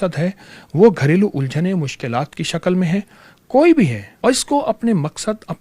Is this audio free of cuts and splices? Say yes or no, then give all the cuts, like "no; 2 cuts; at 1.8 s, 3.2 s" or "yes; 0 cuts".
no; 1 cut; at 4.1 s